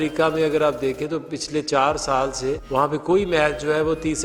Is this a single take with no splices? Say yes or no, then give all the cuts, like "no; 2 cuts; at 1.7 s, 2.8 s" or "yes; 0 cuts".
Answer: yes; 0 cuts